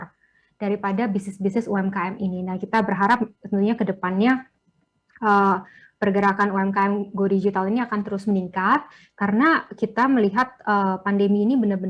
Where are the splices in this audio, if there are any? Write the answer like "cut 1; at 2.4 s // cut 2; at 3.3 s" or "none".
none